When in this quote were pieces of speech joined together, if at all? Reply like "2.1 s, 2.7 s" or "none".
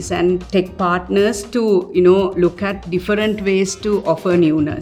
none